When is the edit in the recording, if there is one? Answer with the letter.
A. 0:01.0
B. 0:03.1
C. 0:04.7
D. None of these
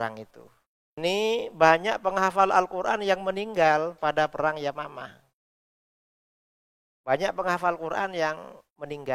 A